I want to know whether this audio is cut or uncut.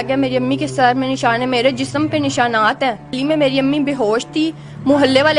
cut